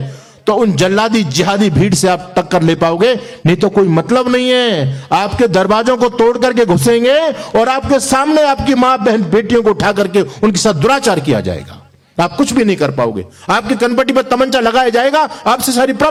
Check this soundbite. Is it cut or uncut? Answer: uncut